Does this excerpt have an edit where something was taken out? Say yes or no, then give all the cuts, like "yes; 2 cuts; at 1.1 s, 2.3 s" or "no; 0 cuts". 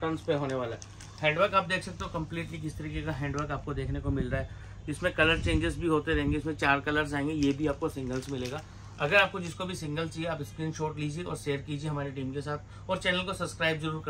no; 0 cuts